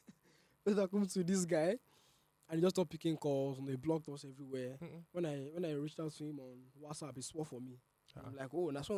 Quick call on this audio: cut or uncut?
uncut